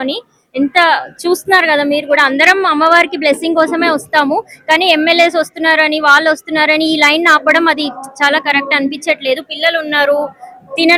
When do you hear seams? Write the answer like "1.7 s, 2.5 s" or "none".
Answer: none